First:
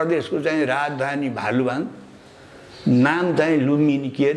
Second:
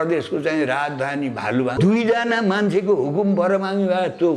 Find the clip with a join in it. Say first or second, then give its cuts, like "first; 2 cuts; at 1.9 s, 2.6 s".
second; 1 cut; at 1.7 s